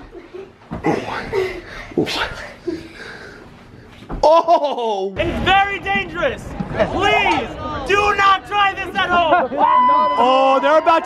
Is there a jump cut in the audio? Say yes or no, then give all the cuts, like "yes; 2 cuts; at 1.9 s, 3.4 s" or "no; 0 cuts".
yes; 1 cut; at 5.2 s